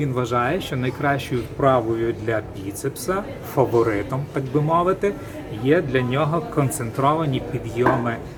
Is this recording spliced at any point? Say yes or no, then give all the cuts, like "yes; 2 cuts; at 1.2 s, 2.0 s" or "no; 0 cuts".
no; 0 cuts